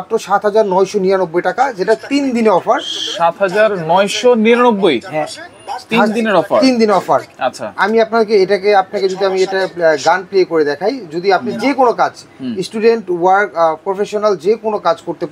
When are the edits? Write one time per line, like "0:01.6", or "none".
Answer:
none